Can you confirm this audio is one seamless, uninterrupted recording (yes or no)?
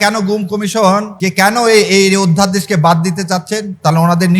no